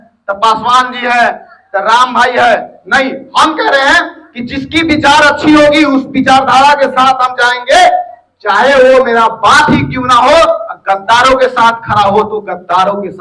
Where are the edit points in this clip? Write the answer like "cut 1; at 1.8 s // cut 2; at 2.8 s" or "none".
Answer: none